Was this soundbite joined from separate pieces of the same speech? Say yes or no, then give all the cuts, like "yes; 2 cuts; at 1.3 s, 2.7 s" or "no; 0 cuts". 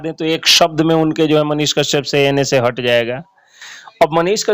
no; 0 cuts